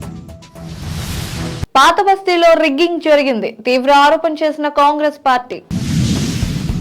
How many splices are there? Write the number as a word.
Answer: one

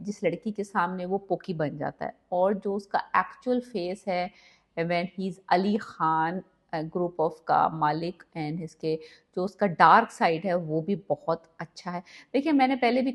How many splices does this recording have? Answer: zero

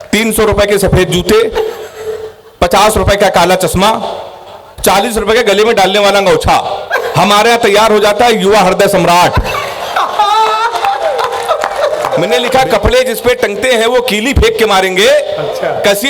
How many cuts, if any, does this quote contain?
one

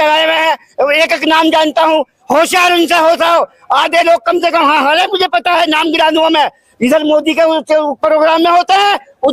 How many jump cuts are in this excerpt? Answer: zero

